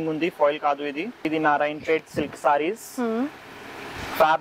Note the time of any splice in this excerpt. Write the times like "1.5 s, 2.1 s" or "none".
1.2 s